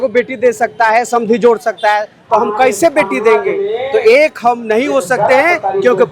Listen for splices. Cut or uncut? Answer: uncut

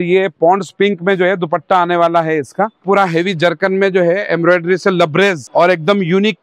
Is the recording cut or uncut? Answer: cut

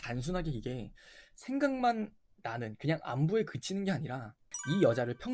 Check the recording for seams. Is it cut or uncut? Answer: uncut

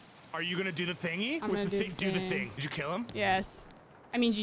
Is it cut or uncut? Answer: cut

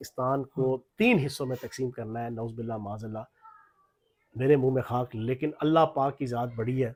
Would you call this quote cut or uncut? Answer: uncut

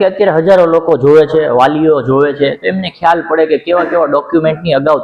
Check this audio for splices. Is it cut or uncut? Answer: uncut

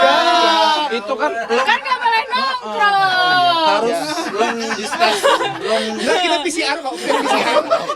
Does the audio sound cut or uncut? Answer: uncut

